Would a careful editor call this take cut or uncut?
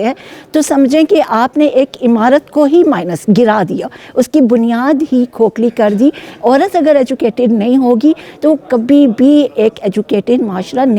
uncut